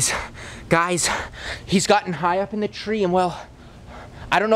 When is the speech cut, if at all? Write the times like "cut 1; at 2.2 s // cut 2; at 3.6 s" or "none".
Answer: none